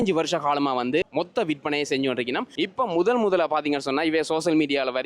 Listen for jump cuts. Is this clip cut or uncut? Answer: cut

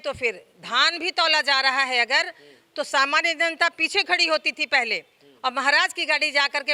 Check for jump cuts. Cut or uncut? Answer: uncut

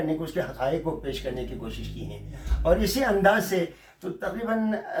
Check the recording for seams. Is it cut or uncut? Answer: uncut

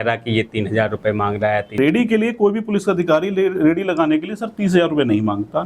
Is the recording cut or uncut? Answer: cut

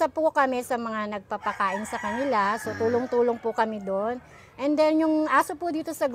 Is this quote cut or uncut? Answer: uncut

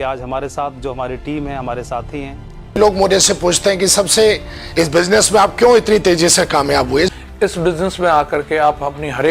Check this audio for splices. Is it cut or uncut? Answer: cut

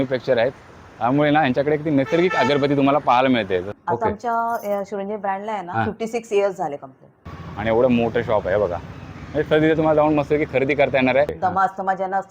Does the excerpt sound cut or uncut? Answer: cut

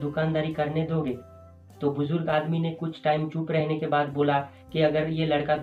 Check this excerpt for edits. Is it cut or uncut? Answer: uncut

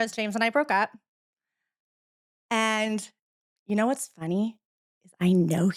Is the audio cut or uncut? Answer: uncut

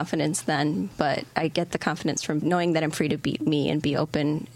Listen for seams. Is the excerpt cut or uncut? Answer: cut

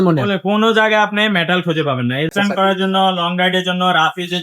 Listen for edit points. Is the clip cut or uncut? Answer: cut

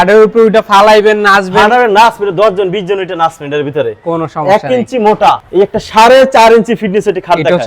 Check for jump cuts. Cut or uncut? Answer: cut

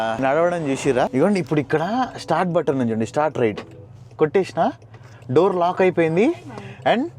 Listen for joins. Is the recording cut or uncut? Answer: cut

